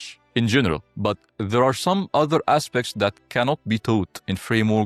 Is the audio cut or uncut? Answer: uncut